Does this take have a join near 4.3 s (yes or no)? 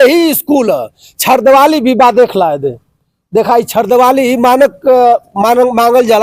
no